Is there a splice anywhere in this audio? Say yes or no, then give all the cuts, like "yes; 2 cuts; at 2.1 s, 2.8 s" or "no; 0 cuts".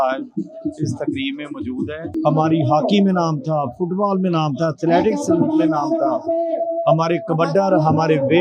yes; 1 cut; at 2.1 s